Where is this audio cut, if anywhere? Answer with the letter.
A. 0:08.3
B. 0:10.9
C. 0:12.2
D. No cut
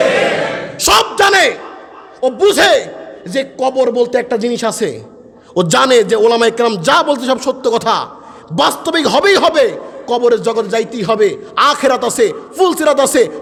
D